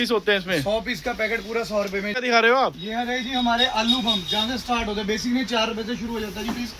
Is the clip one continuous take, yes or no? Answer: no